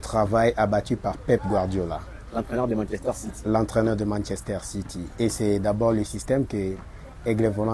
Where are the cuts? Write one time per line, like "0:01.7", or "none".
none